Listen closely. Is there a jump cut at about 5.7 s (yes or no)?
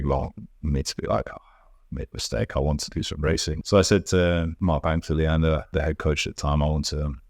yes